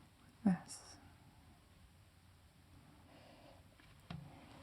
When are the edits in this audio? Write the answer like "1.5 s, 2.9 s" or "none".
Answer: 3.1 s